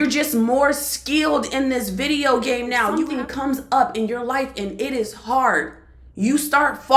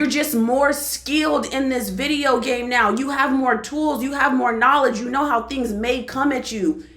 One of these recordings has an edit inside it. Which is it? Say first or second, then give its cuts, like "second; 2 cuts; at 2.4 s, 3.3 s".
first; 1 cut; at 2.9 s